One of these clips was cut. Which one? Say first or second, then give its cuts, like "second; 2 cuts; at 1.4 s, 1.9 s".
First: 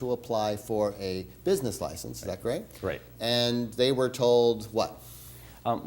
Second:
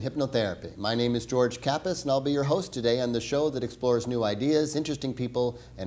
first; 1 cut; at 1.4 s